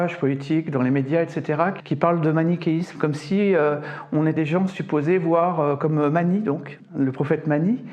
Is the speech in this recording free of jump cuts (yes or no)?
no